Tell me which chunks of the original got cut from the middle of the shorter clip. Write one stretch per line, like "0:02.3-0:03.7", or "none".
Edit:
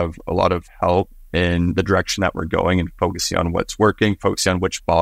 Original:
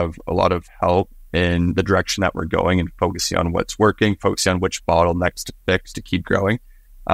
none